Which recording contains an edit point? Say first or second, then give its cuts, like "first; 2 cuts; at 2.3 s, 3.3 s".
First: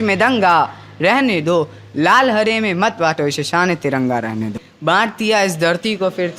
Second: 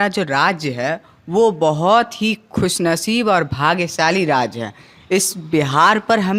first; 1 cut; at 4.7 s